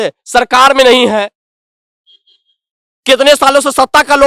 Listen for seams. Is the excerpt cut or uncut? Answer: uncut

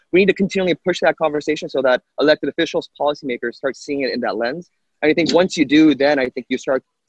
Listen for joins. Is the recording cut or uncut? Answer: uncut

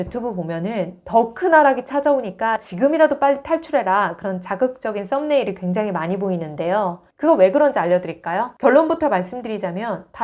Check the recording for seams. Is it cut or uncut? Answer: uncut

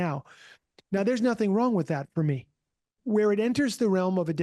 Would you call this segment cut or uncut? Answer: cut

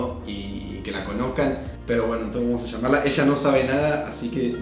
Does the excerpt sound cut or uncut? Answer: cut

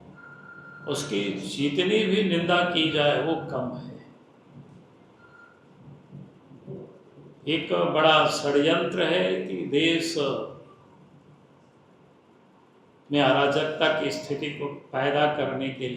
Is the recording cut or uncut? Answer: uncut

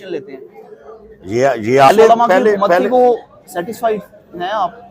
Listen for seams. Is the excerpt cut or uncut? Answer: cut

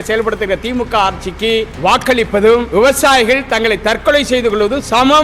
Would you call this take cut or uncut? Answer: cut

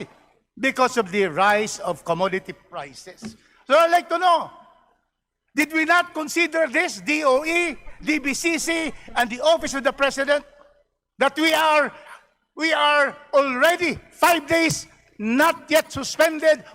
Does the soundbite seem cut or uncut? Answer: uncut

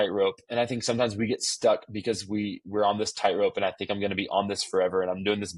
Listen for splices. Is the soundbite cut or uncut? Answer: uncut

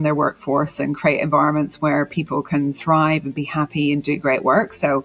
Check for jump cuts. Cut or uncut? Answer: uncut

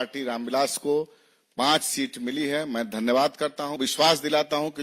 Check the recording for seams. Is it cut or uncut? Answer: cut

